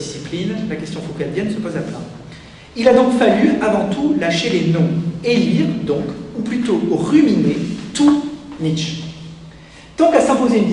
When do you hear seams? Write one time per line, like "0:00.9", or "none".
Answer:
0:07.3